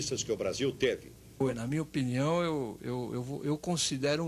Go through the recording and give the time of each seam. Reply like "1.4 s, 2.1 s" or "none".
1.4 s